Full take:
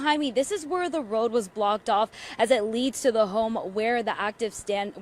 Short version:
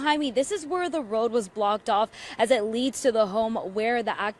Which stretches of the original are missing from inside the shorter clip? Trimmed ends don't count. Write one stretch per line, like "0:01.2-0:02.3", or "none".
none